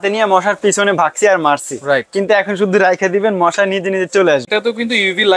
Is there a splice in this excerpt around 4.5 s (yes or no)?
yes